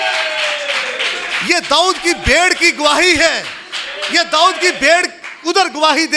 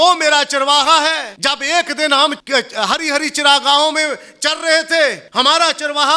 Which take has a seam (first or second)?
second